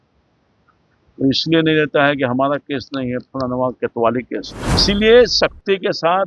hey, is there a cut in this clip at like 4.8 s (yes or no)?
yes